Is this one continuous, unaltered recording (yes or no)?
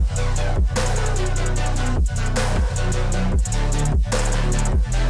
yes